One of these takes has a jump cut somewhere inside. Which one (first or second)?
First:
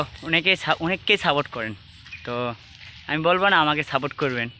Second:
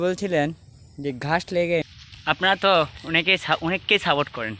second